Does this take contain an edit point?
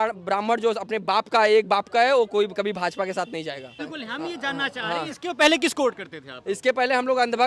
yes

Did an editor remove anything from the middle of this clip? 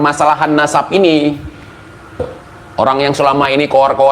yes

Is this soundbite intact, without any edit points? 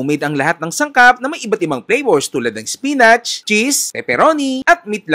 yes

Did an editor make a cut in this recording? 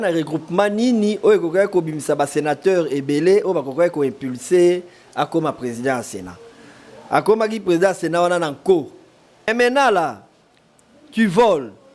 yes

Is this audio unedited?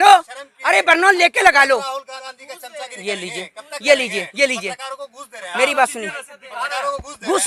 yes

